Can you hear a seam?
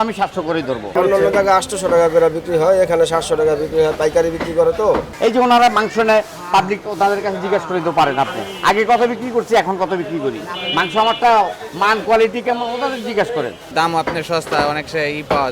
yes; 3 cuts; at 0.9 s, 5.1 s, 13.7 s

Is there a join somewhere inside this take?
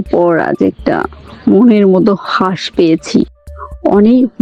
no; 0 cuts

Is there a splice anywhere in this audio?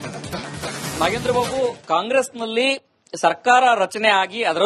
yes; 1 cut; at 1.0 s

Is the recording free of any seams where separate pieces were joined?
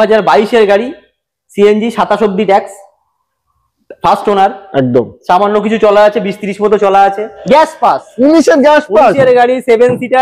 no; 1 cut; at 7.4 s

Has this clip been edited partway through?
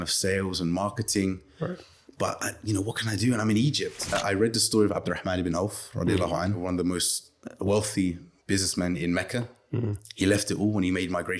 yes; 2 cuts; at 4.1 s, 6.6 s

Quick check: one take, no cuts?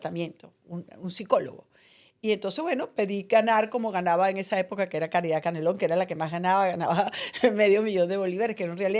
yes; 0 cuts

